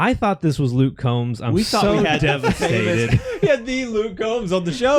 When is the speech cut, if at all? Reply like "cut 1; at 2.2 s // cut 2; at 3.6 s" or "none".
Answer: none